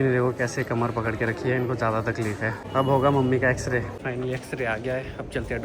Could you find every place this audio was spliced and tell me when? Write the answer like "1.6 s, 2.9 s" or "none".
2.6 s, 3.9 s